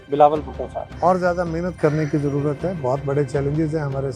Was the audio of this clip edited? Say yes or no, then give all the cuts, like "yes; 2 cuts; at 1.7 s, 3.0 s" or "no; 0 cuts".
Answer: no; 0 cuts